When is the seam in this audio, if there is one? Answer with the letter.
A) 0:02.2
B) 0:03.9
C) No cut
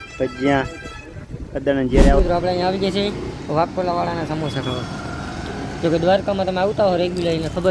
A